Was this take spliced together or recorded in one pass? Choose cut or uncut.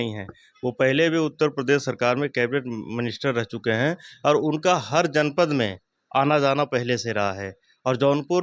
uncut